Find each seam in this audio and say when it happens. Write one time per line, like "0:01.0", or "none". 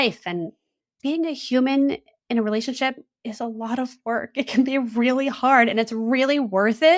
none